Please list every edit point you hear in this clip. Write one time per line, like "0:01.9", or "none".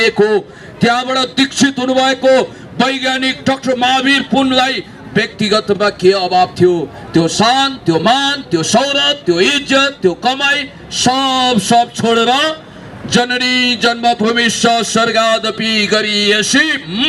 none